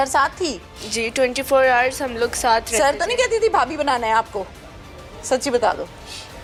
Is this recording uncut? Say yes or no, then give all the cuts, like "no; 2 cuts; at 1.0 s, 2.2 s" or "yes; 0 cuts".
yes; 0 cuts